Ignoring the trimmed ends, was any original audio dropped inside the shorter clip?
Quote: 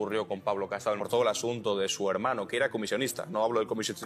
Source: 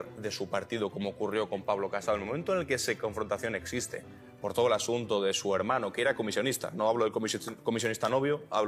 yes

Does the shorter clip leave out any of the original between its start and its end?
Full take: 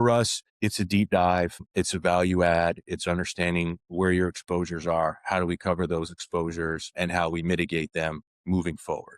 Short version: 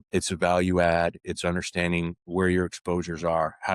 no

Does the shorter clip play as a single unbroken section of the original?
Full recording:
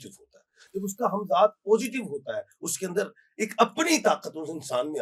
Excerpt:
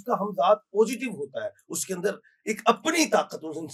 yes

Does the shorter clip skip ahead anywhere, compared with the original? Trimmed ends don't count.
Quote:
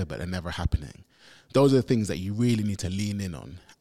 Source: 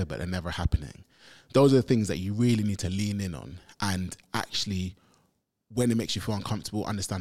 no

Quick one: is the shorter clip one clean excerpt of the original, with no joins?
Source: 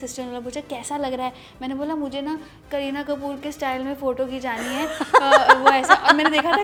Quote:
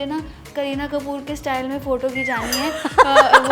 yes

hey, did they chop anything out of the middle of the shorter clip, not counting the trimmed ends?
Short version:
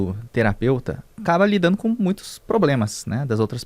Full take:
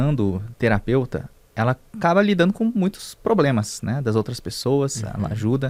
yes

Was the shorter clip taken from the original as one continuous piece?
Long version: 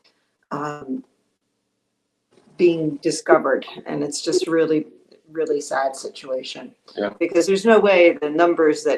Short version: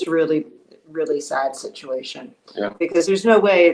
yes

